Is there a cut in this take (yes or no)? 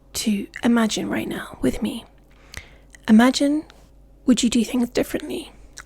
yes